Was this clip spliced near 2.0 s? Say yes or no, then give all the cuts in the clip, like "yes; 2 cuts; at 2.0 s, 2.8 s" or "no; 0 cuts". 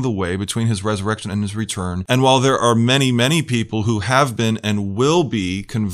yes; 1 cut; at 2.0 s